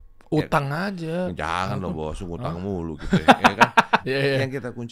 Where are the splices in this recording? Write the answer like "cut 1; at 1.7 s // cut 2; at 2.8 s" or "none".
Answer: cut 1; at 4.0 s